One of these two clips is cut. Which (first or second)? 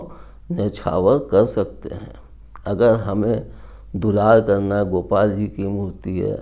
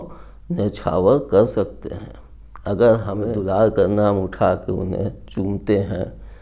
second